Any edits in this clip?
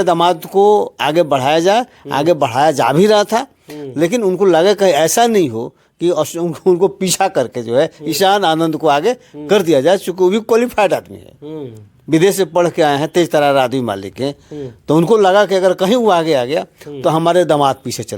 no; 0 cuts

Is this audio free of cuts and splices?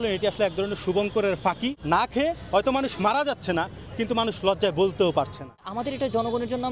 no; 2 cuts; at 1.8 s, 5.7 s

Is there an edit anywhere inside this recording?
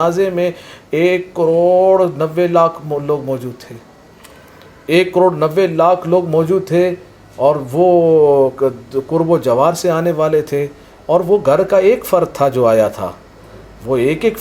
no; 0 cuts

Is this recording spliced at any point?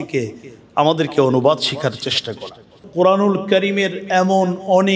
yes; 1 cut; at 2.8 s

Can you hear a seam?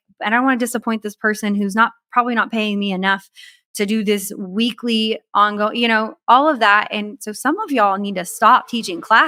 no; 0 cuts

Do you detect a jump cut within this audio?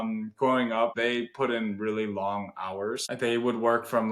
yes; 2 cuts; at 1.0 s, 3.1 s

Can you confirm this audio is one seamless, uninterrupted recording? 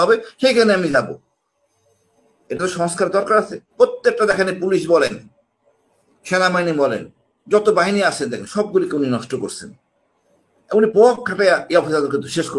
no; 1 cut; at 3.6 s

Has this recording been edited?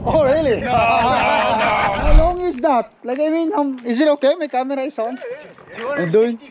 yes; 1 cut; at 2.1 s

